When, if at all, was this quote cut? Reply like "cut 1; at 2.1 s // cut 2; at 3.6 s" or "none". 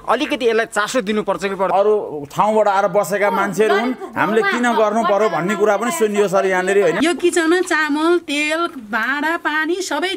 cut 1; at 1.7 s // cut 2; at 7.0 s